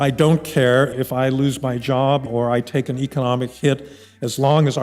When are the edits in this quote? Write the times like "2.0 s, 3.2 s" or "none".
0.9 s, 2.3 s